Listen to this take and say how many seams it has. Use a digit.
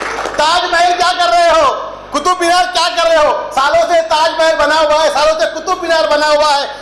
0